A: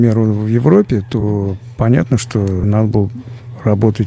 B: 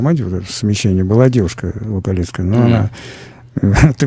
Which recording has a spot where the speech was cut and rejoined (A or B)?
A